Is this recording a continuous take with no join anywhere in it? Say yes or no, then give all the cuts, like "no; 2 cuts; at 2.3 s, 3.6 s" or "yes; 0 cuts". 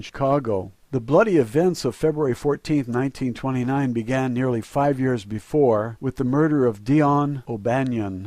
yes; 0 cuts